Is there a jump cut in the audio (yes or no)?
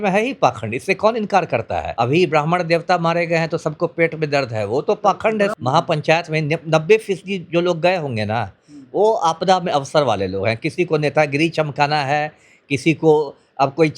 yes